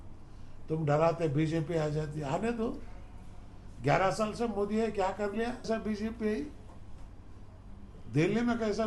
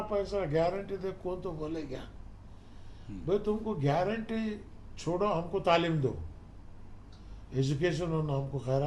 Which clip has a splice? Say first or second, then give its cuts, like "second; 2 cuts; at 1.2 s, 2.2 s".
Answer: first; 1 cut; at 5.7 s